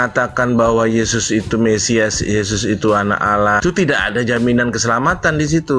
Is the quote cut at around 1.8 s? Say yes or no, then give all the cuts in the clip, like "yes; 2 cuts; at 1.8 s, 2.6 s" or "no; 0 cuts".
no; 1 cut; at 3.6 s